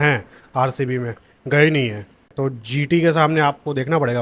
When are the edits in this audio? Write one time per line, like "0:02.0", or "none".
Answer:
0:02.3